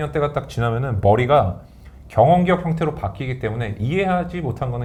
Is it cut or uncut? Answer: uncut